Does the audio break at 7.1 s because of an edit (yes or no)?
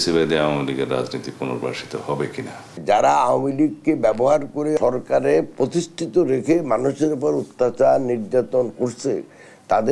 no